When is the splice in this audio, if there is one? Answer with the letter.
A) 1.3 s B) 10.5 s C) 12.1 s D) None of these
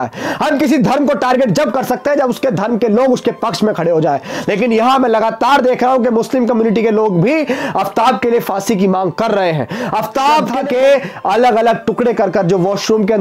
B